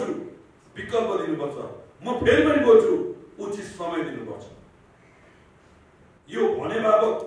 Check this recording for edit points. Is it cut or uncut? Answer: uncut